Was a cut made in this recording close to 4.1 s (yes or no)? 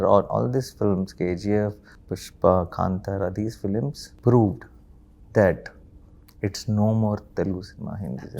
yes